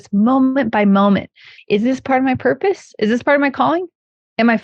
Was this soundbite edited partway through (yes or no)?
yes